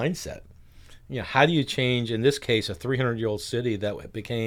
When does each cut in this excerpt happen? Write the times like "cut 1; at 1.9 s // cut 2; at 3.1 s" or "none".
none